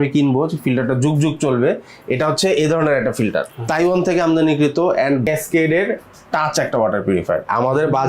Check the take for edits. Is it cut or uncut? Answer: cut